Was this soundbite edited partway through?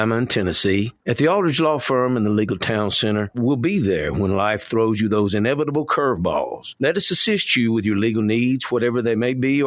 yes; 3 cuts; at 1.0 s, 3.4 s, 6.6 s

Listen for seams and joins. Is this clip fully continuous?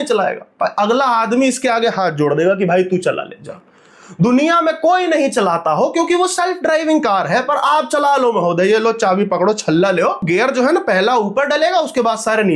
no; 1 cut; at 10.2 s

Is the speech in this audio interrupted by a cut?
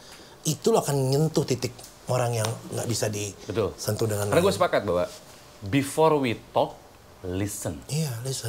no; 0 cuts

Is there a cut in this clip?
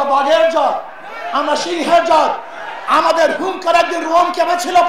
no; 0 cuts

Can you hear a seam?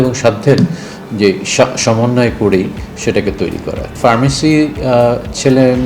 yes; 1 cut; at 3.9 s

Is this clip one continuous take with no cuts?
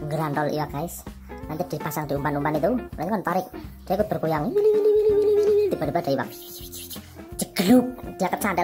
yes; 0 cuts

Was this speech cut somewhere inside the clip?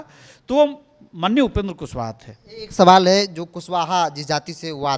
no; 0 cuts

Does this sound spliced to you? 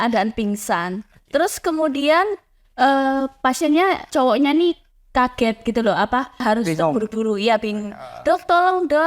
yes; 2 cuts; at 4.1 s, 6.4 s

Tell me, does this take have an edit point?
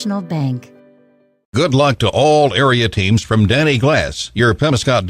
yes; 1 cut; at 1.4 s

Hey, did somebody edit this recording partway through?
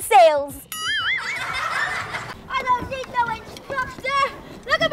yes; 1 cut; at 2.3 s

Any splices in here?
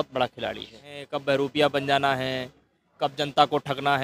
yes; 1 cut; at 1.1 s

